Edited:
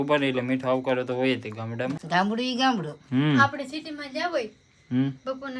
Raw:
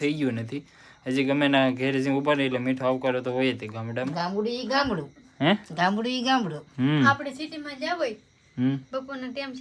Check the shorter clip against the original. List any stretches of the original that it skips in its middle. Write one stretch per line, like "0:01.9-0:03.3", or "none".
0:04.1-0:05.6